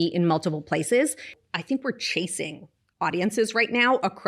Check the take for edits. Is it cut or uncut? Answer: cut